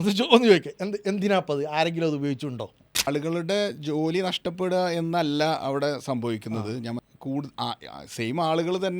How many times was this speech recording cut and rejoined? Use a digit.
2